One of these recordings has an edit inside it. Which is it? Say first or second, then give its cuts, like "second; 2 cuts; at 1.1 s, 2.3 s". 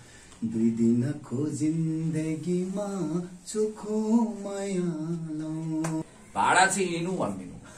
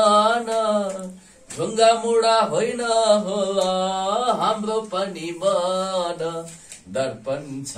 first; 1 cut; at 6.0 s